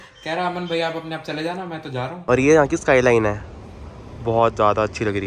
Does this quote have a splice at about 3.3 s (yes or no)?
no